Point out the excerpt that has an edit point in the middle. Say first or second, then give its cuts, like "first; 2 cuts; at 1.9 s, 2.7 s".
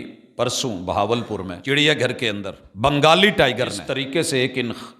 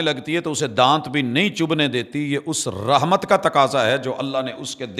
first; 3 cuts; at 1.5 s, 2.6 s, 3.9 s